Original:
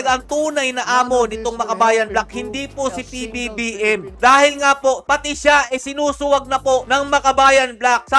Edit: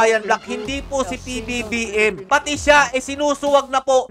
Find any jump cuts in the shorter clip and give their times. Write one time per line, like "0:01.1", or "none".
0:02.2